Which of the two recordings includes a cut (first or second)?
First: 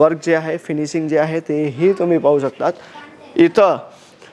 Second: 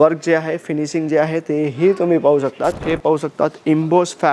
second